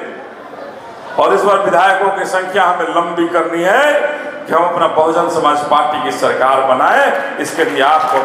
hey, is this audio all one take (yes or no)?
yes